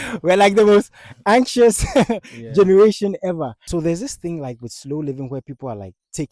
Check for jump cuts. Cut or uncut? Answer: cut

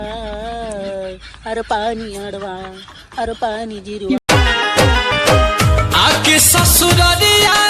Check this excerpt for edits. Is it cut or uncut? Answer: cut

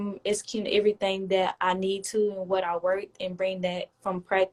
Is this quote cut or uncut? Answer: uncut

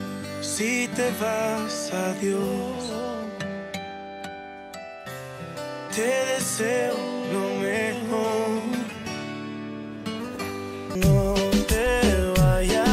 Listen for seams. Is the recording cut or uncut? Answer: uncut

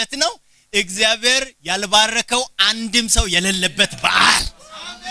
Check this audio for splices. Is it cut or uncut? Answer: uncut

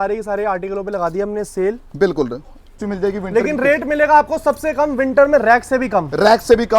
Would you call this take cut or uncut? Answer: cut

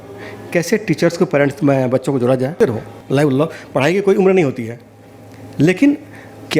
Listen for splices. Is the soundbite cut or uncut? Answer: cut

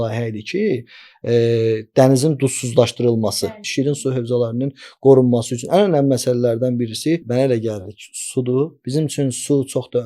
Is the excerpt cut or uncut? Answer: cut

